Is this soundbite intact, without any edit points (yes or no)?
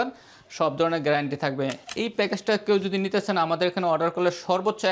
no